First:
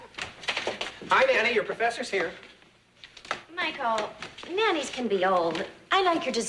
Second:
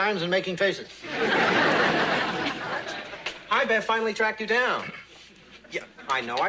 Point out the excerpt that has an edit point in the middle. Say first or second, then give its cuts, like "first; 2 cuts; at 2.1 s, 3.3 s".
second; 1 cut; at 5.5 s